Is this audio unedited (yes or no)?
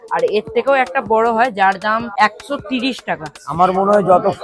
no